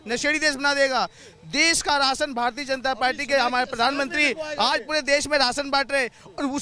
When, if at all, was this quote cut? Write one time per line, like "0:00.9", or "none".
none